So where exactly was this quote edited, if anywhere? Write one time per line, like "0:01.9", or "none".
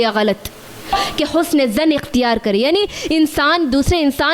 0:01.0